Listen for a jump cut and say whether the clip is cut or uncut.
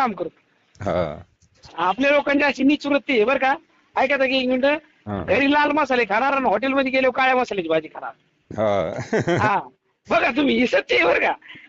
uncut